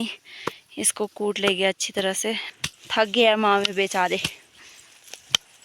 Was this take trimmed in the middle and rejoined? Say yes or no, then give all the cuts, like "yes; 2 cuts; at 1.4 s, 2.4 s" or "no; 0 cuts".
yes; 1 cut; at 2.5 s